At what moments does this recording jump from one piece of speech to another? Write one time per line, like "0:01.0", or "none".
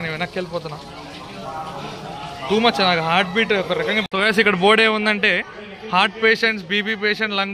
0:04.0